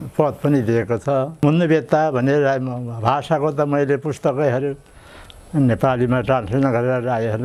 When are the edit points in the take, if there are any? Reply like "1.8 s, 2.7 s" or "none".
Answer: 1.3 s